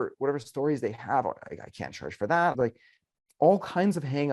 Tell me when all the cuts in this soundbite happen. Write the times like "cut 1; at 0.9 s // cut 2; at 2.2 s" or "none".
cut 1; at 2.5 s